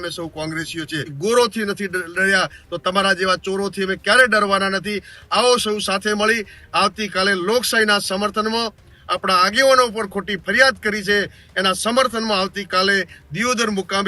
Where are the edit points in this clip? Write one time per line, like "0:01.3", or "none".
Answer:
0:01.1